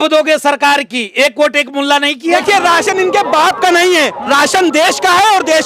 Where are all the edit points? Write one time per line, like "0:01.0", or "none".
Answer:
0:02.4